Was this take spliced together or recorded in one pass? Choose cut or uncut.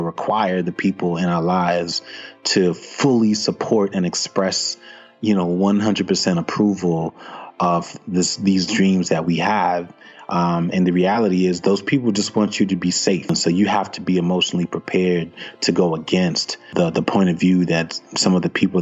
cut